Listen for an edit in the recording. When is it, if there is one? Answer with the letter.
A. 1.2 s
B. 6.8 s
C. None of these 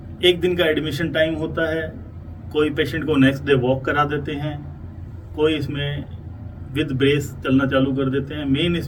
C